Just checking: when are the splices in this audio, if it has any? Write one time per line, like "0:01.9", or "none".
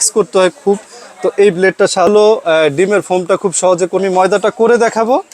0:02.1
0:04.0